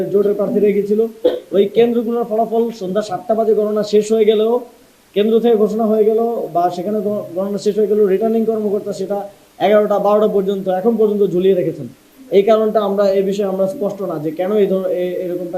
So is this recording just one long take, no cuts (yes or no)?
yes